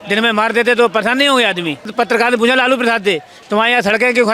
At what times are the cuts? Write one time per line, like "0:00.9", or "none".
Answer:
0:01.9